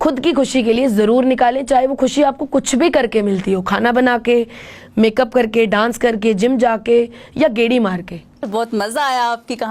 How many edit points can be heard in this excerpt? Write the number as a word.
one